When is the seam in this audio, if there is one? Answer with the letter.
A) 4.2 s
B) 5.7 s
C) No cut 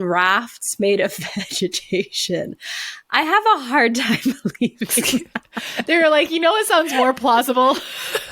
B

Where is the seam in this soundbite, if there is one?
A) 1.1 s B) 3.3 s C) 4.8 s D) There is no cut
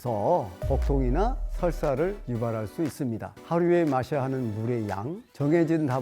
B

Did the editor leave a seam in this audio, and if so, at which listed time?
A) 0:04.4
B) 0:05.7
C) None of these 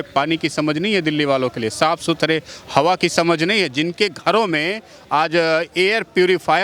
B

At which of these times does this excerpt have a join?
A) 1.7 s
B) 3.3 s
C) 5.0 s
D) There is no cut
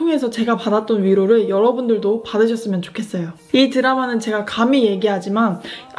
B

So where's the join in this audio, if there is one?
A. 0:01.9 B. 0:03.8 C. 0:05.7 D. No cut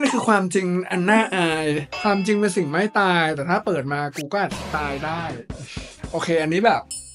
A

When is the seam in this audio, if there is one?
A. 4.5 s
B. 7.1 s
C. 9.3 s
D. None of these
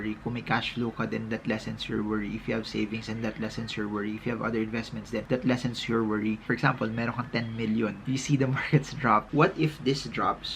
C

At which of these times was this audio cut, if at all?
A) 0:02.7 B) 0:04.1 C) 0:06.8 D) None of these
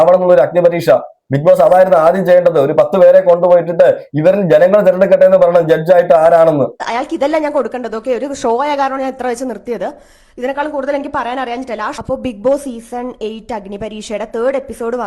C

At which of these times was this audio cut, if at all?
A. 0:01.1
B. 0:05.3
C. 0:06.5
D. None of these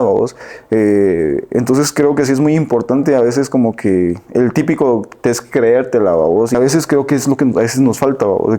C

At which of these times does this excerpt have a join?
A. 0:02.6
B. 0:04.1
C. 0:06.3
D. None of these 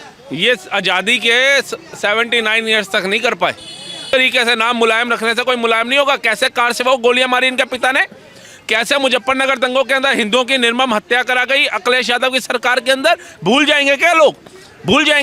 B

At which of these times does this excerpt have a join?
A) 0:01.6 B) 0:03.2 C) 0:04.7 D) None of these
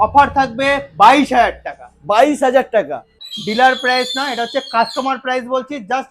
B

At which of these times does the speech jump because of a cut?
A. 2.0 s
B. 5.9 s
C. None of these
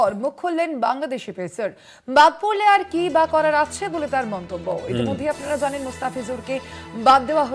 C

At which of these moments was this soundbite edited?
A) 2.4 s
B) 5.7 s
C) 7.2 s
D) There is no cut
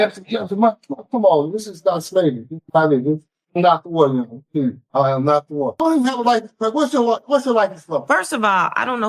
B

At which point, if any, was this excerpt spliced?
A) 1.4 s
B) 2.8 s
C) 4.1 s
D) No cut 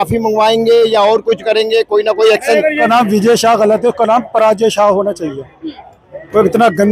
B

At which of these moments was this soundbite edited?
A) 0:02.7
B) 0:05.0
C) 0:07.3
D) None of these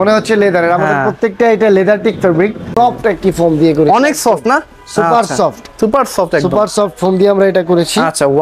A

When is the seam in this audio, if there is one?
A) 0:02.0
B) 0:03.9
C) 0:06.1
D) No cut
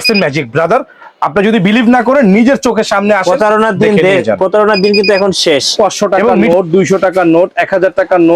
C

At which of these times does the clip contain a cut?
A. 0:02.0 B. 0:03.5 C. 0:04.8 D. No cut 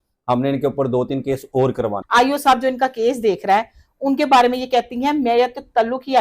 A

